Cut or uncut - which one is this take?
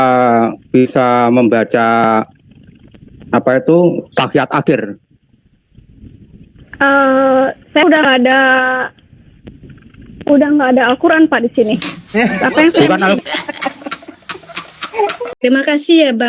cut